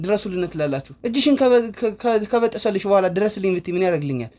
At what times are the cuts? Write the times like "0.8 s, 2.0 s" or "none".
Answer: 0.9 s